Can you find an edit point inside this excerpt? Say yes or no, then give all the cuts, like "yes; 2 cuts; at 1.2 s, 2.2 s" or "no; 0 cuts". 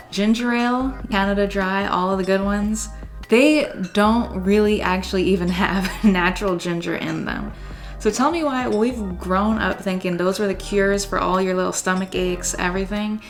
no; 0 cuts